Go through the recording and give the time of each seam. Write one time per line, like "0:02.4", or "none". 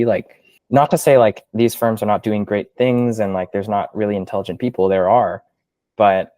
none